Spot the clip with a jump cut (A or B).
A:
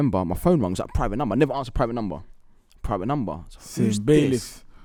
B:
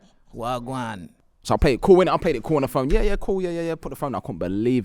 B